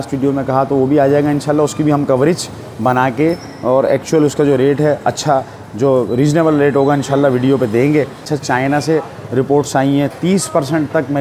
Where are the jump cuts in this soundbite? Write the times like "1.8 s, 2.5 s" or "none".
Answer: 8.3 s